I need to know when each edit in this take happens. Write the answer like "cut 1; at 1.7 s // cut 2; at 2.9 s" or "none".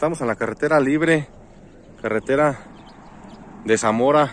none

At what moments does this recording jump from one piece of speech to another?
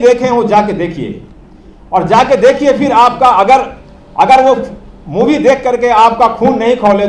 none

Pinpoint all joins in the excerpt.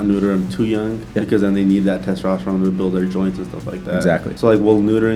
cut 1; at 1.0 s // cut 2; at 4.3 s

